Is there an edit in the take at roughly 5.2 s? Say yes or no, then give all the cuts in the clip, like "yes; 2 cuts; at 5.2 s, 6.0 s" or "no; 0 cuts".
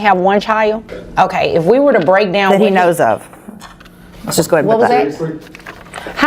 no; 1 cut; at 1.0 s